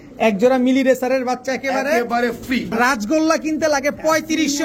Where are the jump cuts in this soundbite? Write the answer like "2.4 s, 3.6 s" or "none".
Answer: 2.7 s

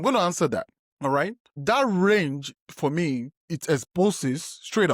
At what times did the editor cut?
1.0 s

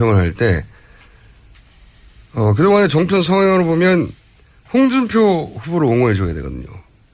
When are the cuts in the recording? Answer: none

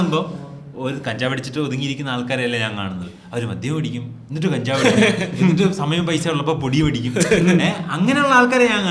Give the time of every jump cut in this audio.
none

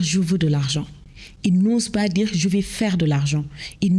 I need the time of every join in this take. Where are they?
none

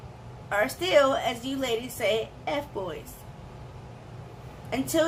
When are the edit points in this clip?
none

